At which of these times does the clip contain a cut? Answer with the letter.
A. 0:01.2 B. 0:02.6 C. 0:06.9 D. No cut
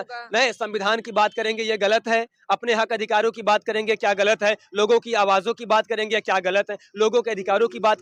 D